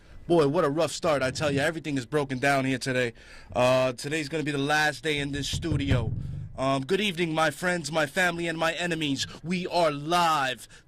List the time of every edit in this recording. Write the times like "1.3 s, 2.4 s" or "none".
none